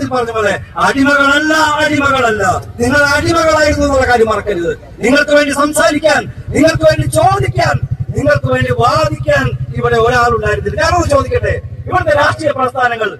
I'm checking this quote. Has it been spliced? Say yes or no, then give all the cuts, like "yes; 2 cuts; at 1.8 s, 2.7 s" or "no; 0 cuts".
no; 0 cuts